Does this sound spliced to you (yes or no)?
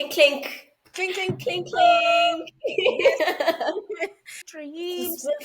yes